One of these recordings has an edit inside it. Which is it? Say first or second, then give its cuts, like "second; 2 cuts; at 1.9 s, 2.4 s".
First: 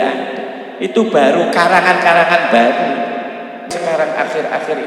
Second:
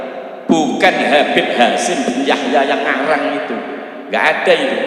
first; 1 cut; at 3.7 s